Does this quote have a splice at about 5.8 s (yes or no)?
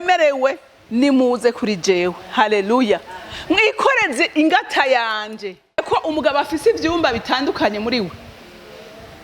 yes